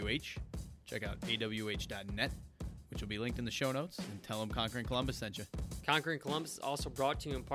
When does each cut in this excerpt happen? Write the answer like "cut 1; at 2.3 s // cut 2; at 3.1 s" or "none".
cut 1; at 5.7 s